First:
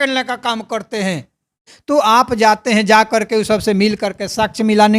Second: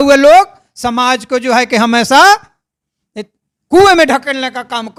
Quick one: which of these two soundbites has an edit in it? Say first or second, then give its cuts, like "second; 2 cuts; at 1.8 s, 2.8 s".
first; 1 cut; at 1.7 s